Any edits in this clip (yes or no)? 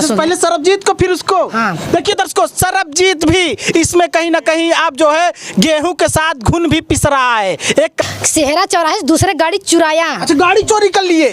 yes